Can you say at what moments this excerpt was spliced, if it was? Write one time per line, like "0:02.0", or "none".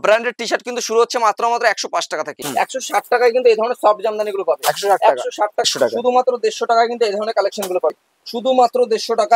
0:02.4
0:05.6
0:08.0